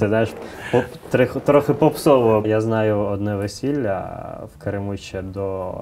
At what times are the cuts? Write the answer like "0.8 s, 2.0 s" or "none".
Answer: 2.4 s